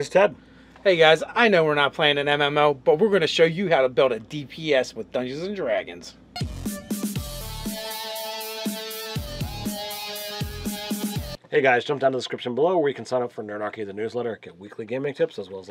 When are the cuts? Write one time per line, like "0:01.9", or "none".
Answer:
0:13.2